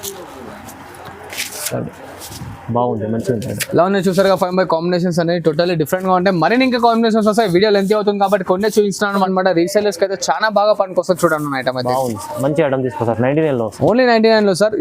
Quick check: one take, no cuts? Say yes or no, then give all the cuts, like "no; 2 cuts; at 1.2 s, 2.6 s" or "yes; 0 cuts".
no; 1 cut; at 9.3 s